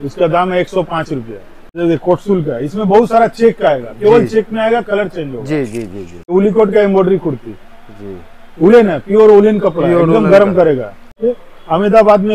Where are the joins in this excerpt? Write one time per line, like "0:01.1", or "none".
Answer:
0:01.8
0:06.3
0:11.2